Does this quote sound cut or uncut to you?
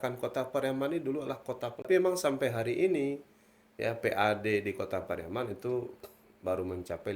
cut